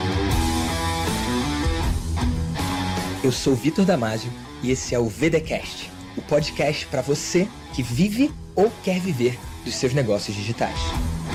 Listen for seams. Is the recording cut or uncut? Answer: uncut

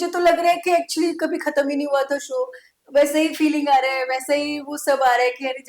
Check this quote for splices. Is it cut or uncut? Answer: uncut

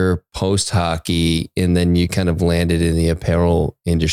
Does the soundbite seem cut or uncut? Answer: uncut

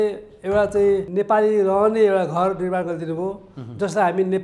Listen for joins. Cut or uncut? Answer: cut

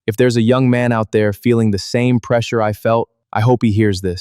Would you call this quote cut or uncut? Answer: cut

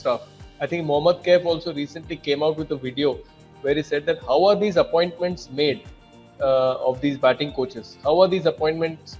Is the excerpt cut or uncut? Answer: uncut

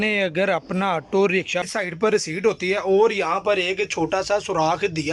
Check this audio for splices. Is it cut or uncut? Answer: cut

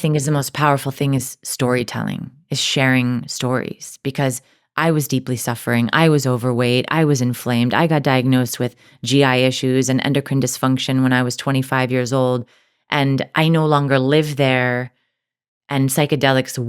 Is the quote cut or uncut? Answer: cut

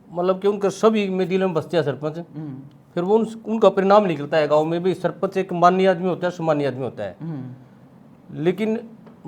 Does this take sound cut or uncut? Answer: uncut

